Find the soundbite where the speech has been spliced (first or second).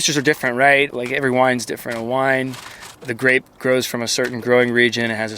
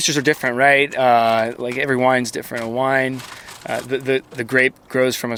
first